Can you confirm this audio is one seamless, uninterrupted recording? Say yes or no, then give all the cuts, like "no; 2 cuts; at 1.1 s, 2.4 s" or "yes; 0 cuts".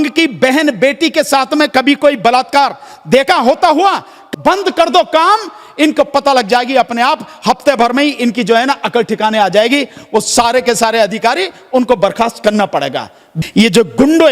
no; 2 cuts; at 4.2 s, 13.3 s